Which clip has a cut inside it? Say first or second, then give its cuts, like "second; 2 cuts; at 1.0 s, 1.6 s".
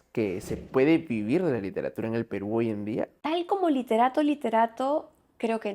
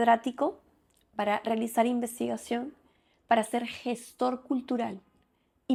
first; 1 cut; at 3.2 s